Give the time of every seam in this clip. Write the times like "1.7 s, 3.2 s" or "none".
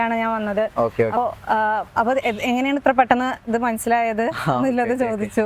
1.2 s

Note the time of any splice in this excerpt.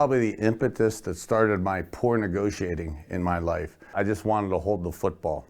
3.9 s

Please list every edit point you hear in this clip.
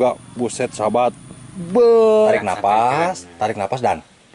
2.1 s

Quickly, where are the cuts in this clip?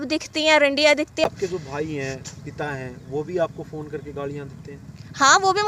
none

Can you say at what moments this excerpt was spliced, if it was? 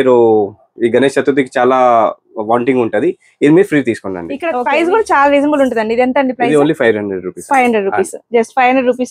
4.4 s

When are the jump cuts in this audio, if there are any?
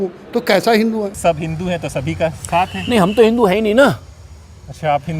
1.1 s

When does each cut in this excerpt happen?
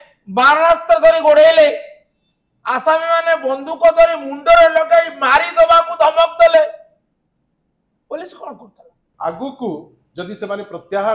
9.0 s

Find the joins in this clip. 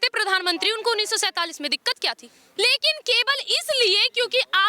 2.5 s

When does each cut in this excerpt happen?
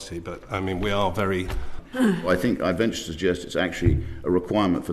1.8 s

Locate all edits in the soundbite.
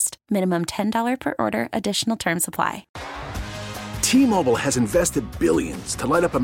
2.9 s

